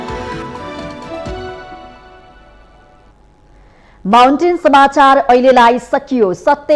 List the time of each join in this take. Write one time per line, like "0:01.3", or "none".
none